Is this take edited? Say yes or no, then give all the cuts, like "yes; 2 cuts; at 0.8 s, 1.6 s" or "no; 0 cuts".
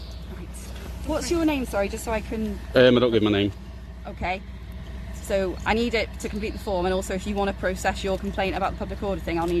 no; 0 cuts